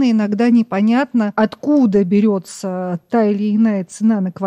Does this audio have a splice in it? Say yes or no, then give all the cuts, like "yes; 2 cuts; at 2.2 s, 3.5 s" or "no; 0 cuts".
yes; 1 cut; at 1.3 s